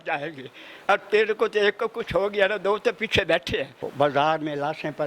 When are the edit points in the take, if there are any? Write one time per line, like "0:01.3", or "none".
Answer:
0:03.8